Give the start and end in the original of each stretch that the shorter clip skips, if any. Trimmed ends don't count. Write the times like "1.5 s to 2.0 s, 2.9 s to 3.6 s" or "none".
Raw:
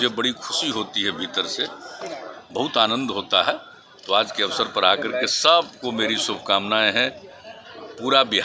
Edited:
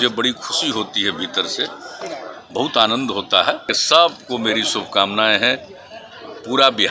3.8 s to 5.3 s